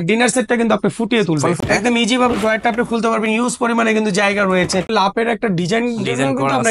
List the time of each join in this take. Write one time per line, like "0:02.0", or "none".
0:01.6
0:04.9